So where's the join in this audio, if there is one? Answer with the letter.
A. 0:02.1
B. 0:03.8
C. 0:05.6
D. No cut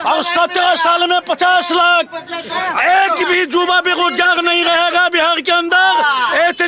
D